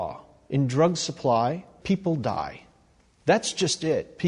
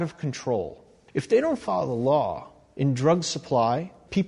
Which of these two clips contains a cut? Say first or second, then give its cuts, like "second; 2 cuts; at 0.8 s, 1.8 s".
second; 1 cut; at 1.1 s